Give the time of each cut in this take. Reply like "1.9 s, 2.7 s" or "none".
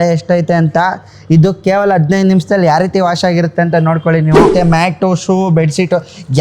4.5 s